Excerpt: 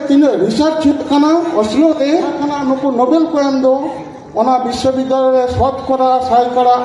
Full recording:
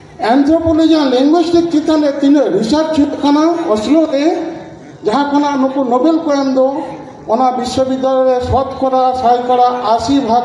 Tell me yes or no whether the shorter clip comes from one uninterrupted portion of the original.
no